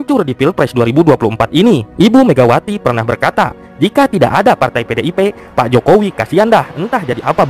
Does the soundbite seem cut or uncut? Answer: uncut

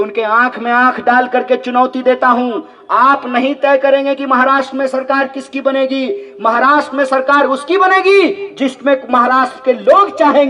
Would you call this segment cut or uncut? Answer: uncut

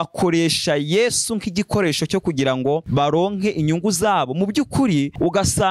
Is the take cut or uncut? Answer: uncut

